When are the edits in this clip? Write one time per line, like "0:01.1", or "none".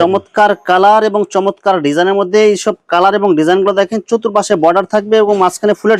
none